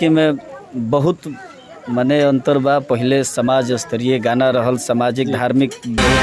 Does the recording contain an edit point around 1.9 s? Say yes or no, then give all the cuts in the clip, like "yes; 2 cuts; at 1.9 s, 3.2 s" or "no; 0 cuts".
no; 0 cuts